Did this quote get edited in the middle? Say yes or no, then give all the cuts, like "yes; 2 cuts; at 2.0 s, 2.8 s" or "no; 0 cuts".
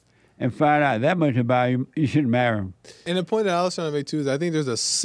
yes; 1 cut; at 2.9 s